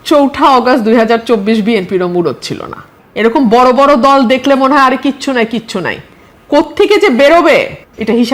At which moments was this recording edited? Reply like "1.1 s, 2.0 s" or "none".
none